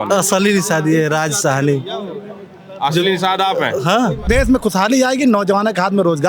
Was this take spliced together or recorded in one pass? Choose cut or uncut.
cut